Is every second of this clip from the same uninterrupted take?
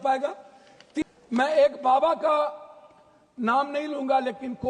no; 1 cut; at 1.0 s

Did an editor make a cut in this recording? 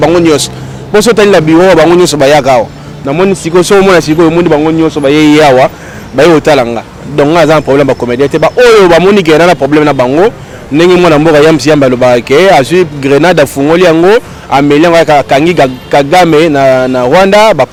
no; 0 cuts

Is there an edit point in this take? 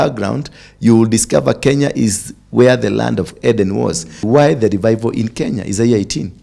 yes; 1 cut; at 4.2 s

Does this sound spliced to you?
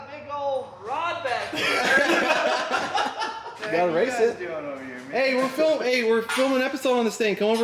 no; 0 cuts

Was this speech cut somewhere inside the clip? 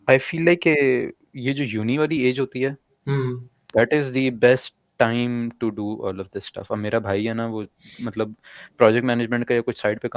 no; 0 cuts

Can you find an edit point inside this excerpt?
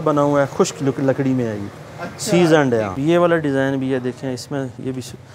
yes; 1 cut; at 3.0 s

